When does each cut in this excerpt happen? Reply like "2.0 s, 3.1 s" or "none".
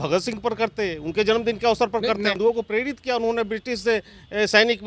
2.4 s